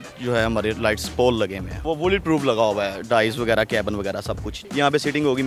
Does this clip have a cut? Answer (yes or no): yes